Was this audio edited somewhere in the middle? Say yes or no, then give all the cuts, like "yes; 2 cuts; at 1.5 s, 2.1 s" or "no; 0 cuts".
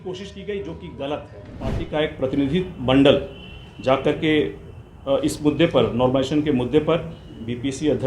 yes; 1 cut; at 1.8 s